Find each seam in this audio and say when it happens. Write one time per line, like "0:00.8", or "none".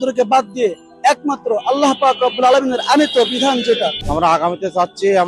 0:04.0